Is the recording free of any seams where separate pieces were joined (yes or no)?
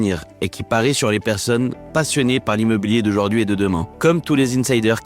no